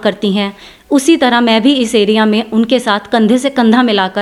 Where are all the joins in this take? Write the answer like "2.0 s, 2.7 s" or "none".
none